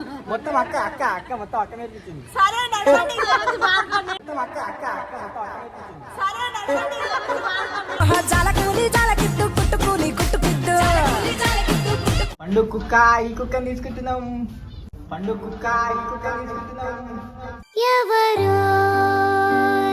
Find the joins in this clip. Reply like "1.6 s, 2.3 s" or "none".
12.2 s